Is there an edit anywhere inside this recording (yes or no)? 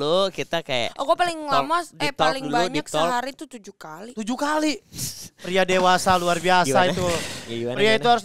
no